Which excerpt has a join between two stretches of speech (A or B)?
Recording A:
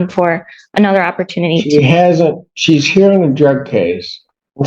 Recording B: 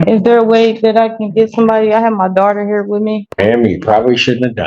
B